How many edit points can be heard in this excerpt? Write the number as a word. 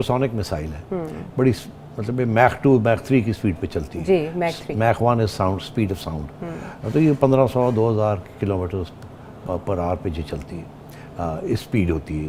zero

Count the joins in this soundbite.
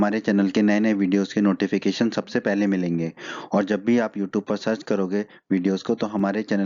zero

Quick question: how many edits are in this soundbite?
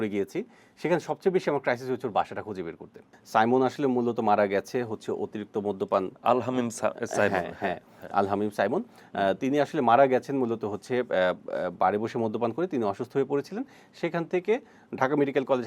one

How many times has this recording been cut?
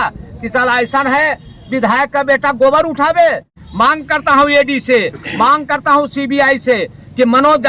one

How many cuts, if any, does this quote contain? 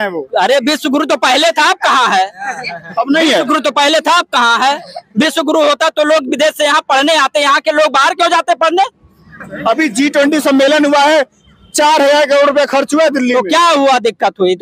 zero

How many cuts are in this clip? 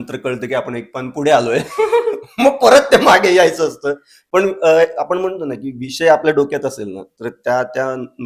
zero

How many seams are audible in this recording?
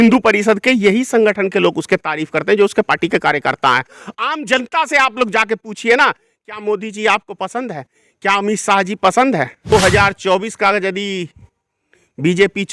one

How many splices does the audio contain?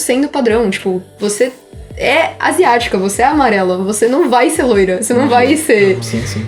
zero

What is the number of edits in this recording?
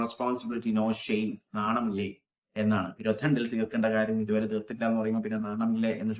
zero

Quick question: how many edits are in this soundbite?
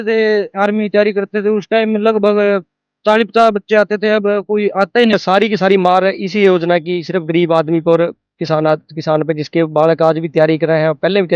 one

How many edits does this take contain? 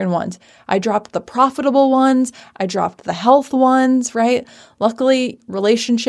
zero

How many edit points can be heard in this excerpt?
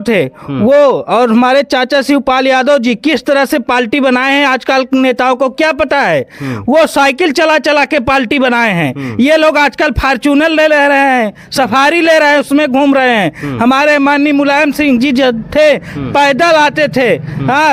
zero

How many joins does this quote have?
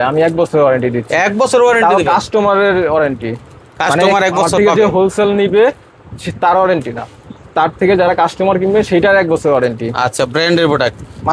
zero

